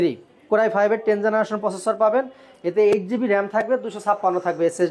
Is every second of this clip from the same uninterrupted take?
yes; 0 cuts

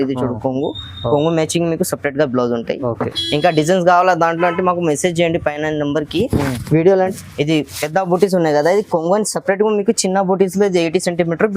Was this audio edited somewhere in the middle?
yes; 1 cut; at 7.1 s

